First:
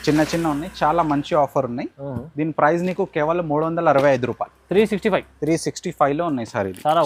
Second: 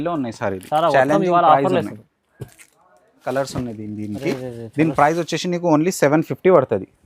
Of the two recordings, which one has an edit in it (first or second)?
second